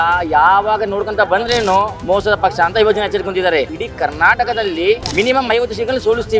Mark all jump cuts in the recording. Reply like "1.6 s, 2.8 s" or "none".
2.0 s, 3.8 s, 5.1 s